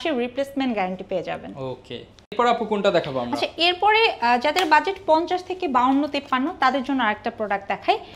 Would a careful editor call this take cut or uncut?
uncut